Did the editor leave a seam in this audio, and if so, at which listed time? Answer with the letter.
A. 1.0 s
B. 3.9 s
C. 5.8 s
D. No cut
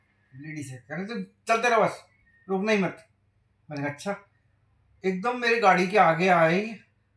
D